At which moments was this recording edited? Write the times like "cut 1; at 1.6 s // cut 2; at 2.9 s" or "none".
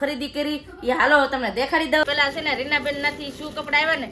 cut 1; at 2.0 s